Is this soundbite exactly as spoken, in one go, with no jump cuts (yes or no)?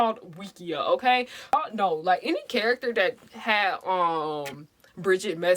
no